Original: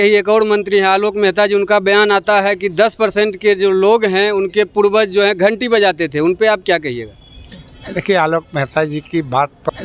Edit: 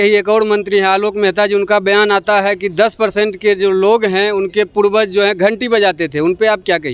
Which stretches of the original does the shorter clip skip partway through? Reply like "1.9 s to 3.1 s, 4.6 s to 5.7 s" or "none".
none